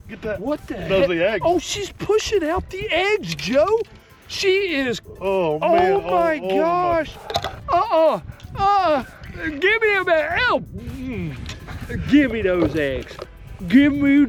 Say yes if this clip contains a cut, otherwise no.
no